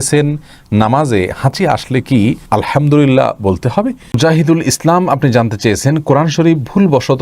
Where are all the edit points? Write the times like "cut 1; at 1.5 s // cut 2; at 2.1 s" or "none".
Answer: cut 1; at 4.2 s